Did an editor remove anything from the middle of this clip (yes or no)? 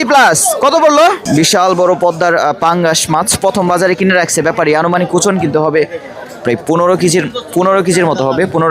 yes